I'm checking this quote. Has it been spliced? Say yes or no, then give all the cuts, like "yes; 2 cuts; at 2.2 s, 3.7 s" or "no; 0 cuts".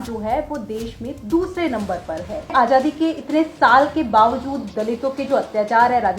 yes; 1 cut; at 2.5 s